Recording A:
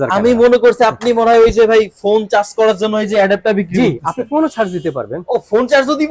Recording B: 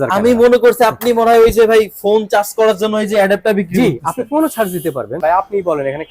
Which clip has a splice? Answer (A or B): B